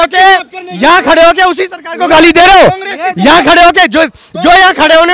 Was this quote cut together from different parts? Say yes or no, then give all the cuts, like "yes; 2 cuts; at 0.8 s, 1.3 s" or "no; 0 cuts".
no; 0 cuts